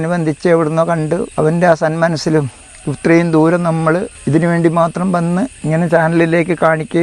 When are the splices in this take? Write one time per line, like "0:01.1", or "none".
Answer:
0:01.3
0:04.1
0:05.6